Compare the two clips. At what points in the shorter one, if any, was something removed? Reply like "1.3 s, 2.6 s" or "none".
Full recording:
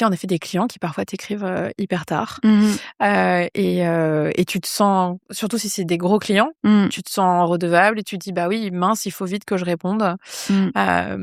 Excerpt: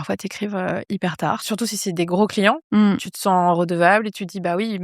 1.4 s